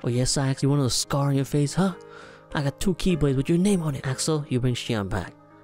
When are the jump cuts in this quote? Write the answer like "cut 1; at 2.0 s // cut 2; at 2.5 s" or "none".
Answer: cut 1; at 4.1 s